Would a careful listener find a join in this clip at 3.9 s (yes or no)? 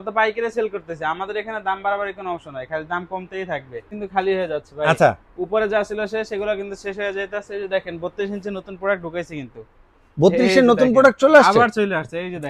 yes